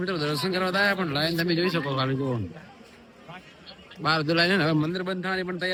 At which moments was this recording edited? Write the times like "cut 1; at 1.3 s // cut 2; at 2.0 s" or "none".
none